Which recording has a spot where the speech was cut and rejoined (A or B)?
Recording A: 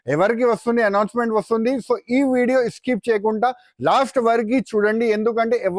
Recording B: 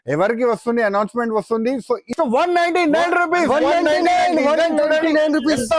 B